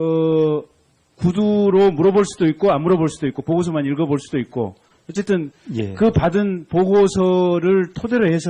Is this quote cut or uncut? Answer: cut